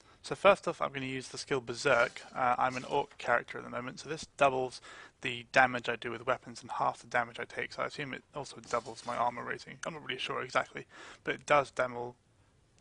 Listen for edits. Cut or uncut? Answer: cut